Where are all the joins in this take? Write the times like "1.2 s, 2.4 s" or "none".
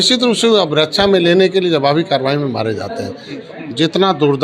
3.4 s